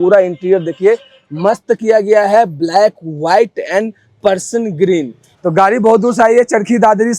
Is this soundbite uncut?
no; 1 cut; at 5.4 s

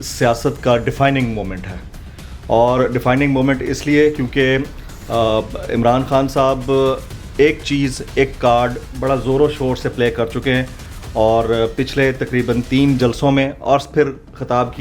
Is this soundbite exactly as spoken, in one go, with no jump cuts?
yes; 0 cuts

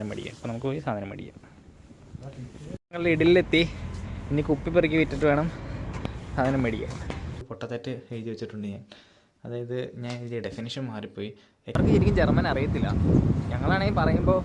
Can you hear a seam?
yes; 3 cuts; at 2.9 s, 7.3 s, 11.8 s

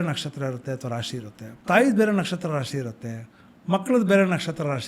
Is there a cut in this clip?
yes; 1 cut; at 1.4 s

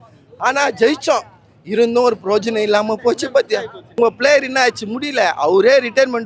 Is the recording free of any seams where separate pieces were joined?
no; 1 cut; at 3.8 s

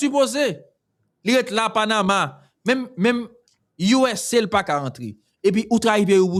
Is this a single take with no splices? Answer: yes; 0 cuts

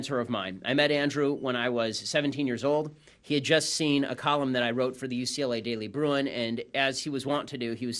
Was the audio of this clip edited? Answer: yes; 1 cut; at 3.2 s

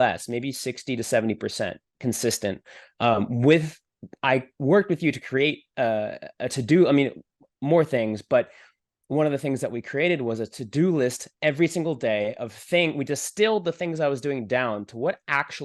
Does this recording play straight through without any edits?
yes; 0 cuts

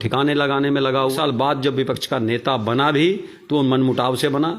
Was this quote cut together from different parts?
yes; 1 cut; at 1.1 s

